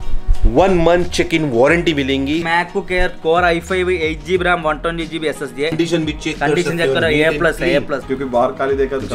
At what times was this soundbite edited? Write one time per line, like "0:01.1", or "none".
0:02.4
0:05.7
0:08.1